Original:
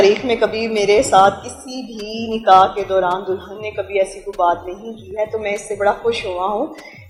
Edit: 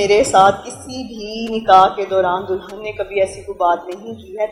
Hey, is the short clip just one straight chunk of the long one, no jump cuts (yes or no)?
yes